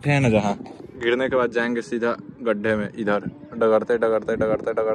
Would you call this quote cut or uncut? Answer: uncut